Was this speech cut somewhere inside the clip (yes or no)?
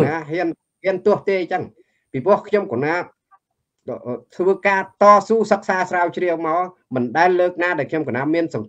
no